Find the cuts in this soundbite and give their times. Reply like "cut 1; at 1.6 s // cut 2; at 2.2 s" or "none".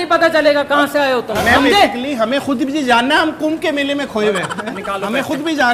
none